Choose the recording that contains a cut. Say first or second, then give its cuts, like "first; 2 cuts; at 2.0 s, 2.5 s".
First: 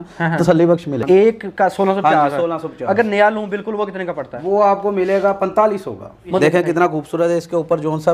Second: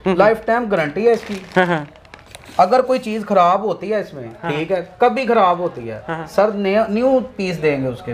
first; 2 cuts; at 0.9 s, 6.4 s